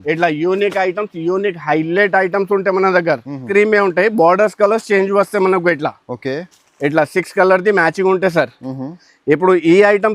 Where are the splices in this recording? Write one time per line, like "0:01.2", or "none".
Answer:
0:03.4

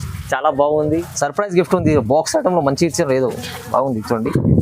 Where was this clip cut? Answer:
0:01.1

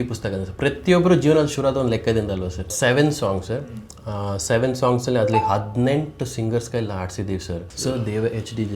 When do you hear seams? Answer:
0:02.7
0:07.7

